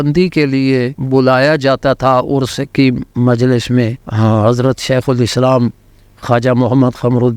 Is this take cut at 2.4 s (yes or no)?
no